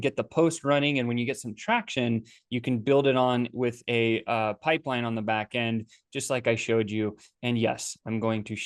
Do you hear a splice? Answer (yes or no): no